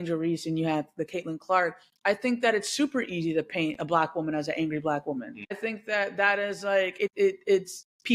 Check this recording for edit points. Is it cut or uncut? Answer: cut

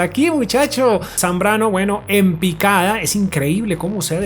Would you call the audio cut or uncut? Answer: cut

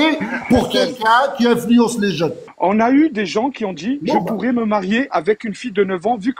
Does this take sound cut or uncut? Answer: cut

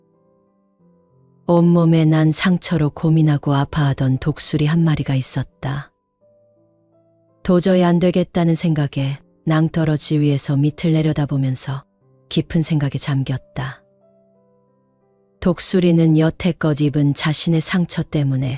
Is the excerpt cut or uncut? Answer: cut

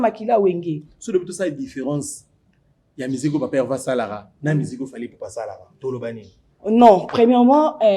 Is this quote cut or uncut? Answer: cut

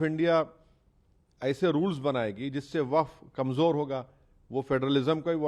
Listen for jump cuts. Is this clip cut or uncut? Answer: uncut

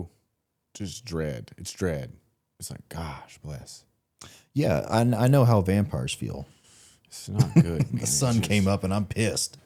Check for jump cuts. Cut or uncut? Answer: uncut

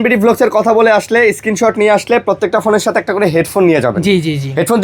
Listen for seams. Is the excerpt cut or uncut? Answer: uncut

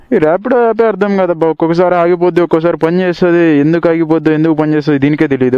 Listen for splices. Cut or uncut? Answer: uncut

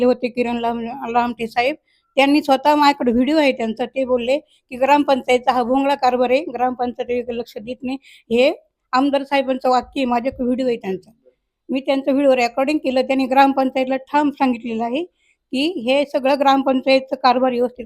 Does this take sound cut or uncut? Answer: uncut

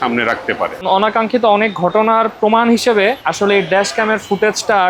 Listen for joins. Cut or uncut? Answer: cut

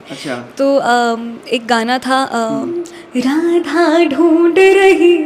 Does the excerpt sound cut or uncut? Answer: cut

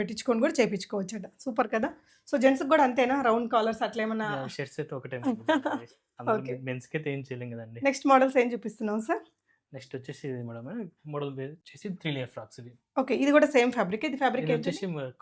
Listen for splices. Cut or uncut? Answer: uncut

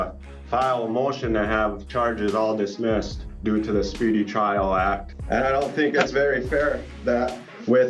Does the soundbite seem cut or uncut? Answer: cut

